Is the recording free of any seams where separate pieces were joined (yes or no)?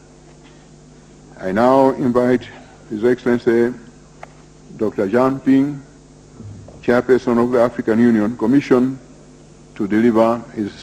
yes